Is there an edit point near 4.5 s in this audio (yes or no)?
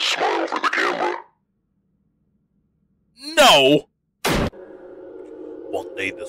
yes